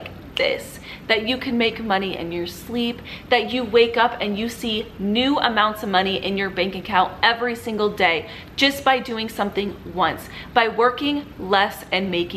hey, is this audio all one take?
yes; 0 cuts

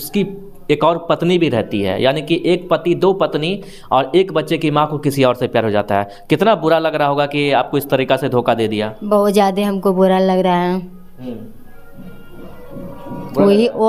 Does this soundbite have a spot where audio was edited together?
no; 0 cuts

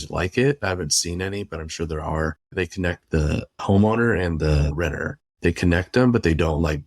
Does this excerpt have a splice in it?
yes; 3 cuts; at 2.5 s, 3.6 s, 4.7 s

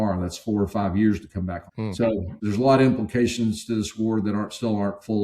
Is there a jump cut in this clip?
yes; 1 cut; at 2.1 s

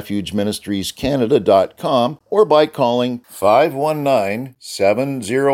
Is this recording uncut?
no; 1 cut; at 2.2 s

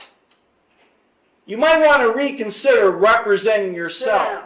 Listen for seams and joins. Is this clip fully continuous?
yes; 0 cuts

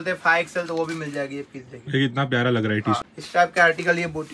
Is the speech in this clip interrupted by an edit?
yes; 1 cut; at 3.0 s

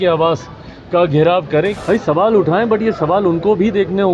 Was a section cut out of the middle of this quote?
yes; 1 cut; at 1.8 s

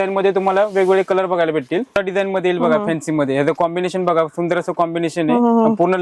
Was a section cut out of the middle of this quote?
yes; 1 cut; at 1.9 s

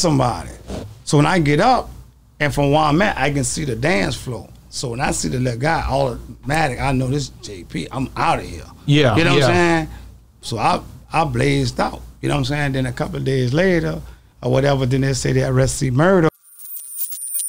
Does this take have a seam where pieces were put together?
yes; 1 cut; at 16.3 s

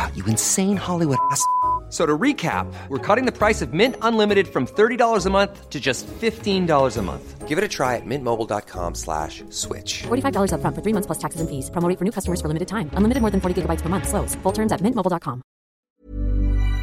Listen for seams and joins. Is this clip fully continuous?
no; 1 cut; at 15.8 s

